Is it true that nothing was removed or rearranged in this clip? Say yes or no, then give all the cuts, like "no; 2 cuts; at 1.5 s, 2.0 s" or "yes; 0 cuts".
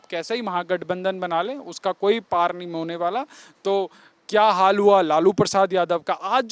yes; 0 cuts